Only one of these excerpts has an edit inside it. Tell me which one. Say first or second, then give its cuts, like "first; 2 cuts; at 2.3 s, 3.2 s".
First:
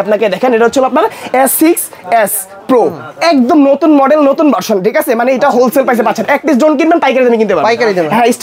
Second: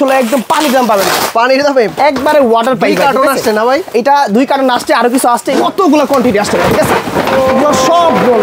second; 1 cut; at 5.5 s